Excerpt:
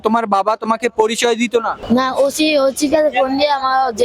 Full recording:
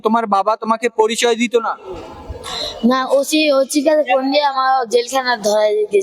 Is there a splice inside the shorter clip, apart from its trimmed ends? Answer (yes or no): yes